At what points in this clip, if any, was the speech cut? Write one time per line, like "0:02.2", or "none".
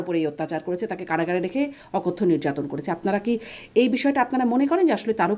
none